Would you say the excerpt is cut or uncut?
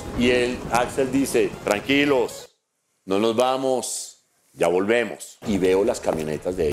cut